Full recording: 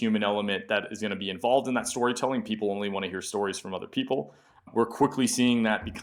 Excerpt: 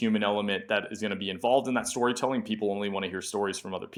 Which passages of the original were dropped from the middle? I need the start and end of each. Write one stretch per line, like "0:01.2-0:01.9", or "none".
none